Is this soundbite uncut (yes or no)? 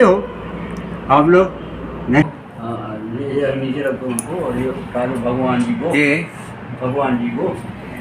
no